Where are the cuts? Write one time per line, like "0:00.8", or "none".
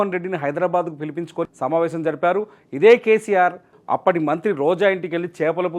0:01.5
0:03.7